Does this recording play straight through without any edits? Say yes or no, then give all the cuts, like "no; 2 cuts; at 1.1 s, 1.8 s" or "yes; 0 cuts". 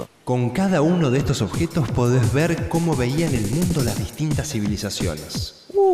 no; 1 cut; at 2.7 s